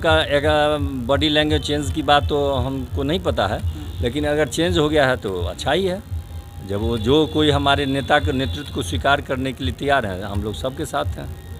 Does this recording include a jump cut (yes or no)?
no